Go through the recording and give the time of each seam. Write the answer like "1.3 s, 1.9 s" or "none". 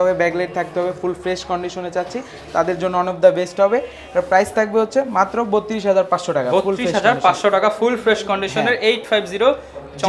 none

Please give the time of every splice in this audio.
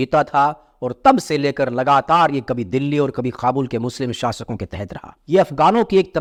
none

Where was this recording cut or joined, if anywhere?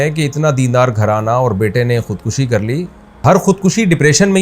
3.2 s

